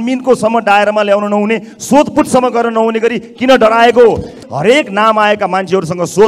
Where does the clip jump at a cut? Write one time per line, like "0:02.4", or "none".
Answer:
0:04.5